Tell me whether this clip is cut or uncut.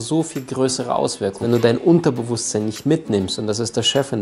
cut